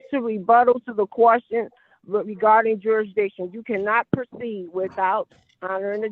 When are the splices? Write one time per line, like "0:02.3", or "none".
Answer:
none

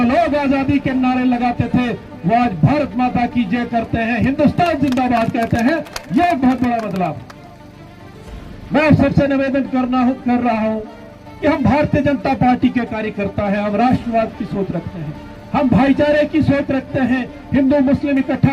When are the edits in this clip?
none

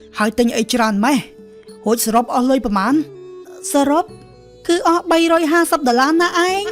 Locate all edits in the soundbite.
0:03.4

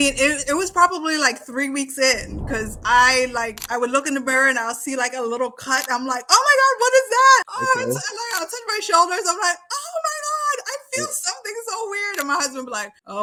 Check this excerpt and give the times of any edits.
none

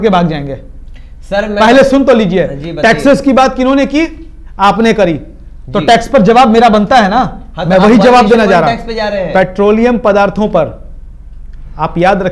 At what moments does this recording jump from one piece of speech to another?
none

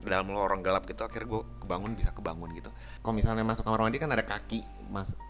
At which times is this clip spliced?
0:02.9

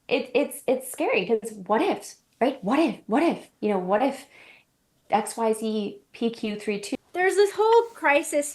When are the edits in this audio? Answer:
0:06.8

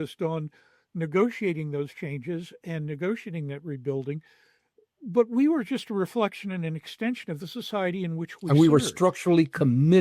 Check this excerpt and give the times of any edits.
none

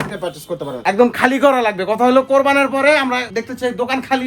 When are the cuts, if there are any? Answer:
0:00.8
0:03.3

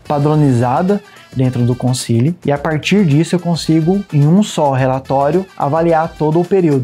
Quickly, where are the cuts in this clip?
0:02.4
0:04.1
0:05.5

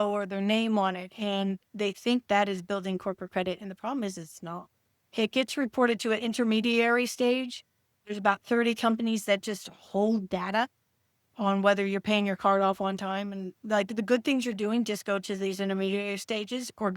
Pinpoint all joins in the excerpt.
none

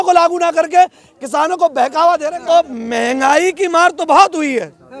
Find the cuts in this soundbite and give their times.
0:02.3

